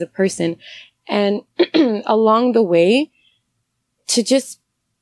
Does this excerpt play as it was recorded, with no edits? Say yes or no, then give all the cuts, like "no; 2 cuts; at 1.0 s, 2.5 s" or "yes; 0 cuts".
yes; 0 cuts